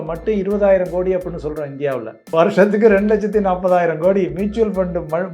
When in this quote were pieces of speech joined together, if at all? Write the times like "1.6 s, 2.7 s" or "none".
2.2 s